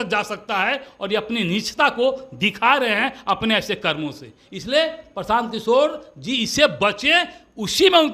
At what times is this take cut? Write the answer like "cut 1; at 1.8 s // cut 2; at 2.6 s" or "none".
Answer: none